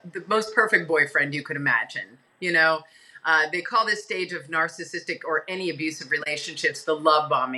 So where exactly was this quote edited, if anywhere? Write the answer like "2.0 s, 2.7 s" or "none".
none